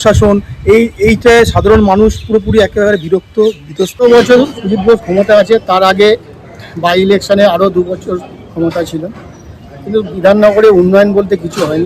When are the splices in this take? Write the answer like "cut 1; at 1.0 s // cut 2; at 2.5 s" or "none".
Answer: cut 1; at 4.0 s